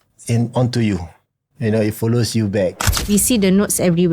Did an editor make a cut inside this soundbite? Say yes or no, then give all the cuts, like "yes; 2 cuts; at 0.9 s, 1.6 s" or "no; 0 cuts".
yes; 1 cut; at 3.0 s